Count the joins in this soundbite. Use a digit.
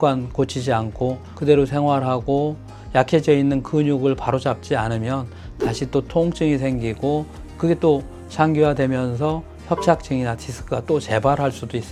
0